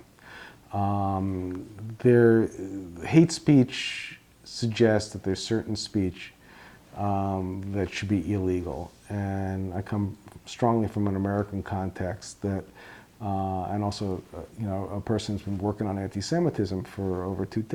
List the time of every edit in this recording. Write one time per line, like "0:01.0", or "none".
none